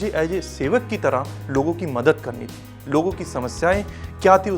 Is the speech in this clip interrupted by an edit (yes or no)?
no